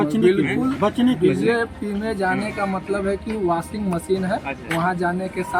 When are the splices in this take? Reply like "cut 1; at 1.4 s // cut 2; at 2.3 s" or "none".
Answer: none

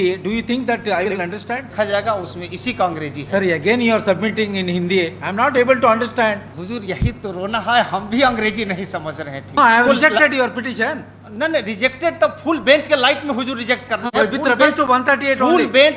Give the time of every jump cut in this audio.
cut 1; at 1.7 s // cut 2; at 6.5 s // cut 3; at 9.6 s

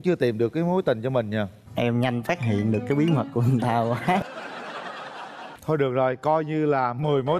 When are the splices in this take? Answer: cut 1; at 5.4 s

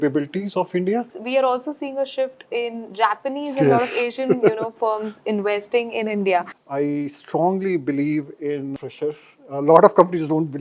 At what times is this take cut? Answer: cut 1; at 1.1 s // cut 2; at 6.5 s

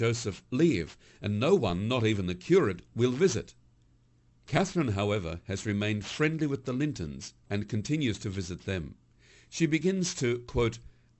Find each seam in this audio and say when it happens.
cut 1; at 2.3 s

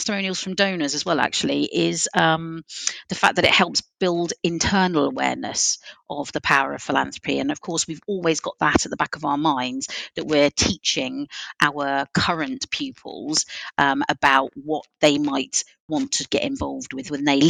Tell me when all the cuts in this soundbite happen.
none

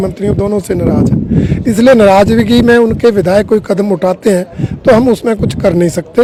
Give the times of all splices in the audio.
none

